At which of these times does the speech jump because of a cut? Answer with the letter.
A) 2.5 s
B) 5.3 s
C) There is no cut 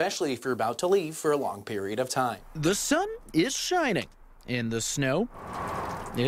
A